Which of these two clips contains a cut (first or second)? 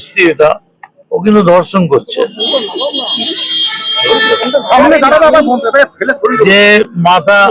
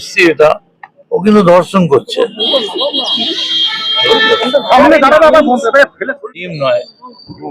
second